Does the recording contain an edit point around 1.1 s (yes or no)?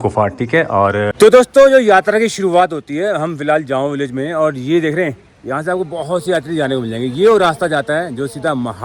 yes